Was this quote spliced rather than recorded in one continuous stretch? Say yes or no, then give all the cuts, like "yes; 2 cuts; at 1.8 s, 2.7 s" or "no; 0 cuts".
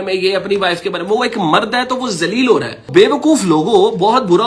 yes; 1 cut; at 2.9 s